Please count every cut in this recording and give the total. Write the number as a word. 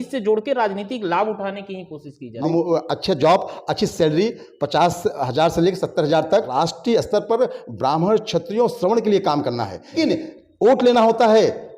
three